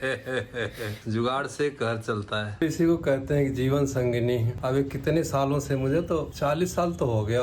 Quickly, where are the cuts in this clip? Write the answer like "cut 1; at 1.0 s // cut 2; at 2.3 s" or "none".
cut 1; at 1.0 s // cut 2; at 2.6 s